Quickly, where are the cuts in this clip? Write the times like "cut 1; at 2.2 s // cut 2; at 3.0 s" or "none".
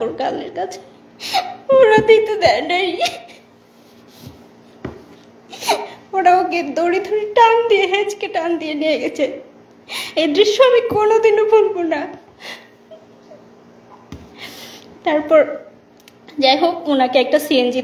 none